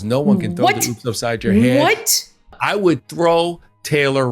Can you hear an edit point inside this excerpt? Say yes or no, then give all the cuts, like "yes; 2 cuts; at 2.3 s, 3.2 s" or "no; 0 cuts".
yes; 1 cut; at 2.5 s